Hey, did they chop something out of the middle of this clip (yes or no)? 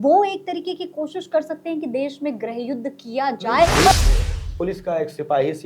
yes